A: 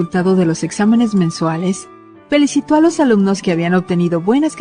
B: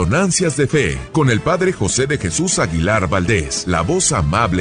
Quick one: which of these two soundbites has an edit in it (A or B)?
B